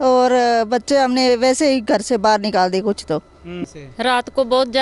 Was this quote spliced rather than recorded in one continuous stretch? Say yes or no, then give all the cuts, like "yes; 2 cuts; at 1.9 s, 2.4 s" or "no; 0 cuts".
yes; 1 cut; at 3.6 s